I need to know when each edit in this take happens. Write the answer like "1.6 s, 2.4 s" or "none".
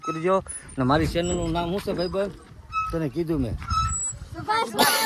none